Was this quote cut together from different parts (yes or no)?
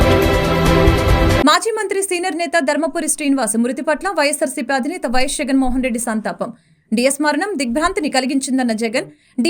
yes